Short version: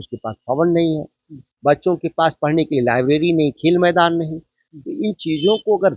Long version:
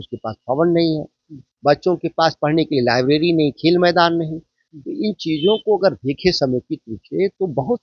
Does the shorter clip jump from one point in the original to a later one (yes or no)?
no